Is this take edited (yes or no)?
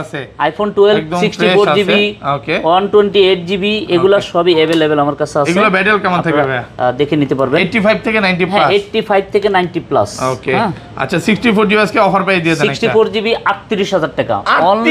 no